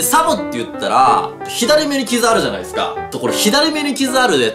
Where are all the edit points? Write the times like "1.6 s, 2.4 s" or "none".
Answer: 1.4 s, 3.0 s